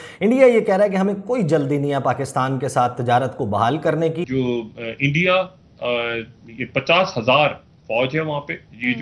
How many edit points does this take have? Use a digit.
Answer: 1